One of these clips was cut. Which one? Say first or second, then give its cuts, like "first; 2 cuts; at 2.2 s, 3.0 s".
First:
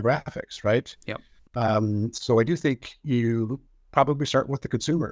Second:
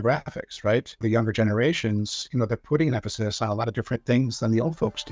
second; 1 cut; at 1.0 s